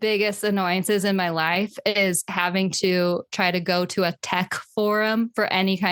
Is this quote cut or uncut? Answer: uncut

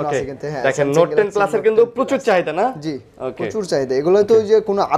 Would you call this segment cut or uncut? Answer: uncut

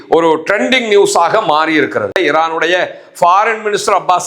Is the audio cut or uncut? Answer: cut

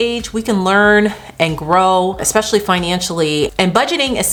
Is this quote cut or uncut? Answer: uncut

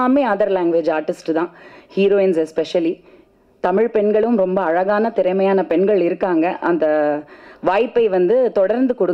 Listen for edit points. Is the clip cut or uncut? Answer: uncut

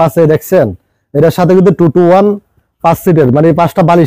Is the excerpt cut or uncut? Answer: uncut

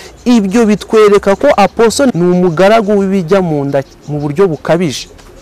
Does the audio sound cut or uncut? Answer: cut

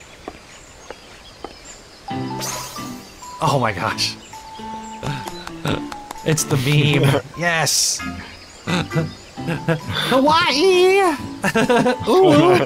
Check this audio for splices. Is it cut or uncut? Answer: uncut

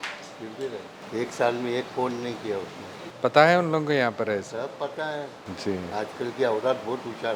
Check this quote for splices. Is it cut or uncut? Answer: cut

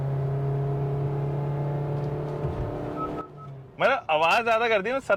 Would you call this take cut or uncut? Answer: uncut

